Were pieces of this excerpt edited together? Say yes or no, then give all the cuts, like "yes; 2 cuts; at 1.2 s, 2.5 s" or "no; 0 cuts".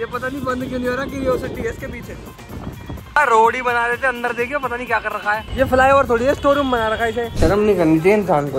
yes; 3 cuts; at 3.2 s, 5.5 s, 7.3 s